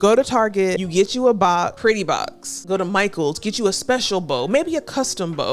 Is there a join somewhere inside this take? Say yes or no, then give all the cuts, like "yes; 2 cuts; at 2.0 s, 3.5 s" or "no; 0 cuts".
yes; 2 cuts; at 0.8 s, 2.0 s